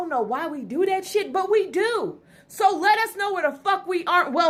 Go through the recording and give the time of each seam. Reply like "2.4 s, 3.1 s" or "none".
none

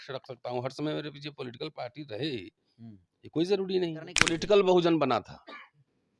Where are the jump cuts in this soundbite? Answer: 4.3 s

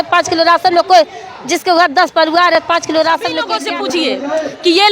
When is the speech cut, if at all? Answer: 3.6 s

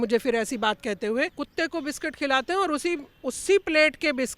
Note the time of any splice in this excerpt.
1.4 s

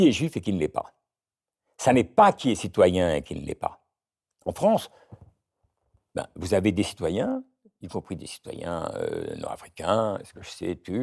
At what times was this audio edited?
none

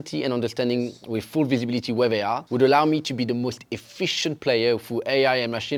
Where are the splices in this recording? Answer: none

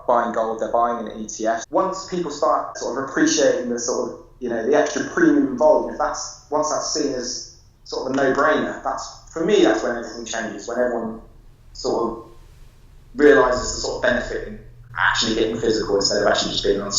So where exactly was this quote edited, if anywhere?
1.6 s, 2.8 s

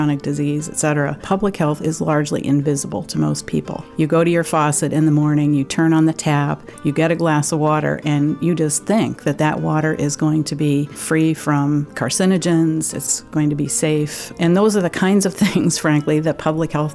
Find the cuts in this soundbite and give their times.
1.2 s, 3.8 s, 11.0 s, 12.0 s, 13.0 s, 14.3 s

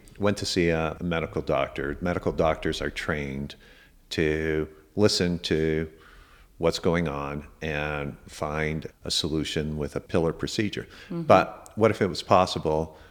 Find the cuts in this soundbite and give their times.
1.0 s, 8.9 s, 10.1 s

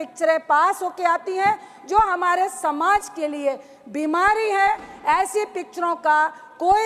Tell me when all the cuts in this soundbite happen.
none

